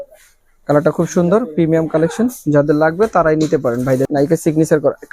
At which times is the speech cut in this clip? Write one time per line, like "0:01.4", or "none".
0:04.1